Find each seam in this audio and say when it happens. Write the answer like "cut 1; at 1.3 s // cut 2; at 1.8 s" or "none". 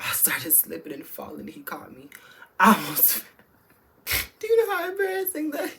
none